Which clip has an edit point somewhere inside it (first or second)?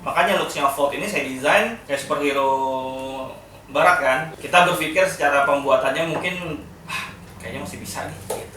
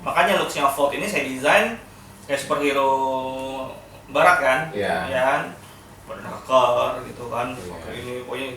first